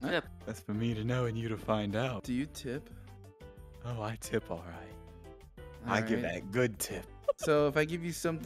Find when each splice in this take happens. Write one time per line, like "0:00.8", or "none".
0:02.2